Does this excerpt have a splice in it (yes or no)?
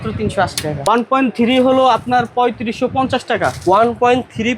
yes